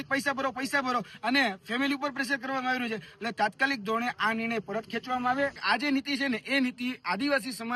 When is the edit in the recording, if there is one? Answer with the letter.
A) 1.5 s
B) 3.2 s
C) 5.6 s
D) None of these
C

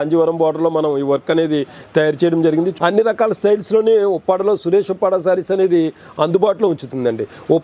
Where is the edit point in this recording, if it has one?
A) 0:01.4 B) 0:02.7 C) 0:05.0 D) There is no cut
B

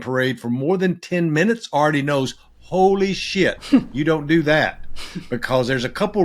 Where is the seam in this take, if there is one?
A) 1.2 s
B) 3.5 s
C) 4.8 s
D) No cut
D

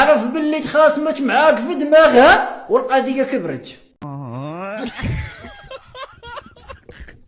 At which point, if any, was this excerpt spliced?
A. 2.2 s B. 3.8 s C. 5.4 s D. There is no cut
B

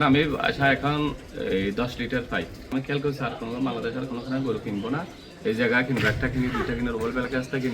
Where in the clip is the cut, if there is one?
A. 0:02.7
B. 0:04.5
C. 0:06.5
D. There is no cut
A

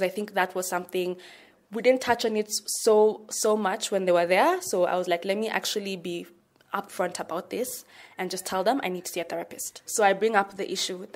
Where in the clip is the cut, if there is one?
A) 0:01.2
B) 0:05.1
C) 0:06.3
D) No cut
D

